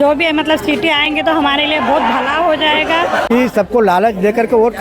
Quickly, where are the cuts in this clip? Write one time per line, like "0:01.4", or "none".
0:03.3